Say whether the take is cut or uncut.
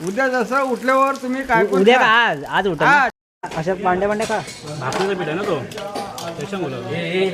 cut